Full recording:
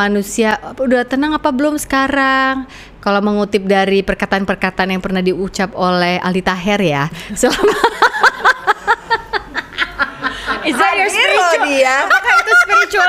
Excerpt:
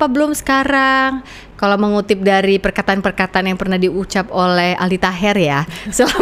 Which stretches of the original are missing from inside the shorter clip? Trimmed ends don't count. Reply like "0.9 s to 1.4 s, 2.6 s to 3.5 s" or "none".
none